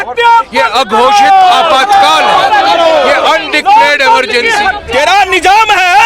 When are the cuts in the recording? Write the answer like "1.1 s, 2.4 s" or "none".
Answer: 4.8 s